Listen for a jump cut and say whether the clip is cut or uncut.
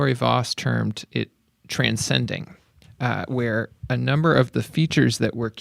uncut